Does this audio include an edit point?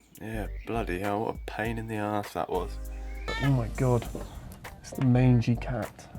yes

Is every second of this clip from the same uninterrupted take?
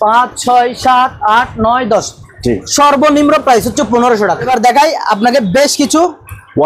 no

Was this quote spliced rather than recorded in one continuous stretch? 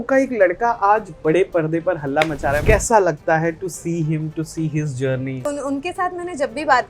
yes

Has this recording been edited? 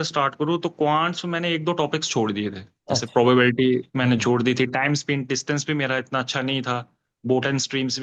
no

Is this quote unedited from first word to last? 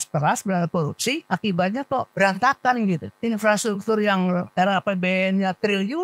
no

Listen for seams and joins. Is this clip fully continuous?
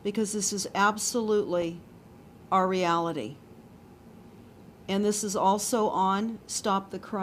yes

